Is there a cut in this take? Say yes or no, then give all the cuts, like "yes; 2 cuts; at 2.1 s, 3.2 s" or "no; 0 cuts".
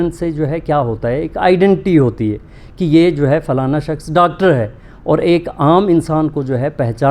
no; 0 cuts